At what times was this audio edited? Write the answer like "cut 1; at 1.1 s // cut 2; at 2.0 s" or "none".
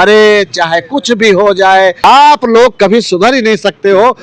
cut 1; at 2.0 s